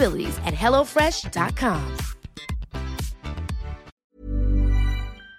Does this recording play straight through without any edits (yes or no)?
no